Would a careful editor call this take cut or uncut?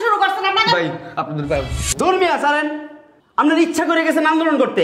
cut